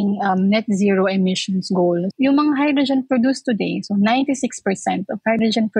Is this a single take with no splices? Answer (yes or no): no